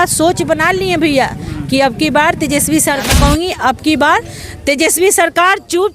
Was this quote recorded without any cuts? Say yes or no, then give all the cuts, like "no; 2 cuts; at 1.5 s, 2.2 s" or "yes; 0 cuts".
no; 1 cut; at 3.1 s